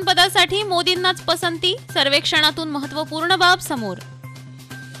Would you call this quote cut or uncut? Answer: uncut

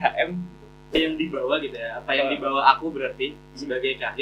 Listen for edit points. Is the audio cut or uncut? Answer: cut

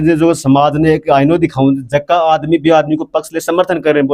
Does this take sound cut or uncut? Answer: uncut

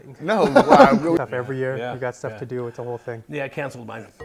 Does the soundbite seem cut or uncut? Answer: cut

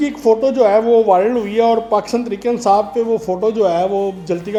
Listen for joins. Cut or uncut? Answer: uncut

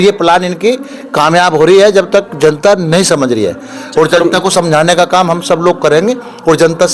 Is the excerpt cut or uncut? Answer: uncut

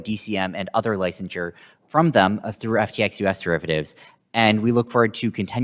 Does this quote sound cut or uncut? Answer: uncut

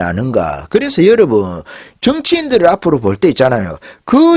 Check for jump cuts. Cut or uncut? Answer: uncut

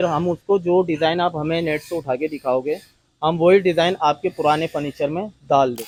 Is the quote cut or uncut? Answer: uncut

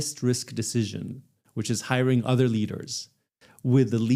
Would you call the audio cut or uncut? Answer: uncut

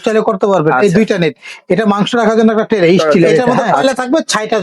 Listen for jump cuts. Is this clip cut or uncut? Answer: cut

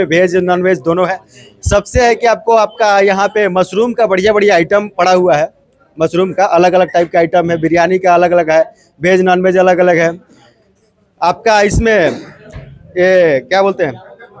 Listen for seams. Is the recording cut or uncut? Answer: uncut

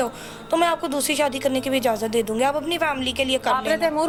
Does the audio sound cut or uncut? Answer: uncut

